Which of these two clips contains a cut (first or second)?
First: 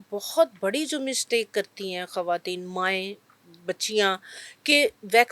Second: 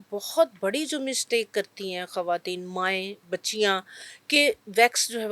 second